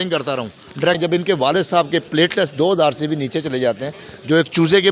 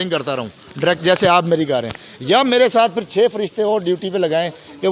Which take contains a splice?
first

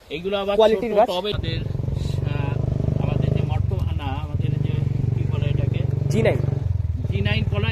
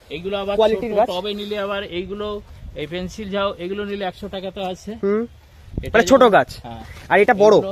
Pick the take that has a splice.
first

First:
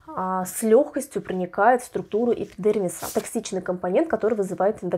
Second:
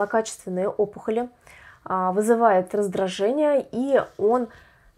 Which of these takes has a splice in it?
first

